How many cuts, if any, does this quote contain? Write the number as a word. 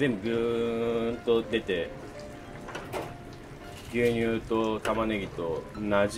zero